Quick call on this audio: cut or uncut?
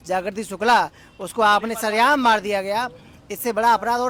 uncut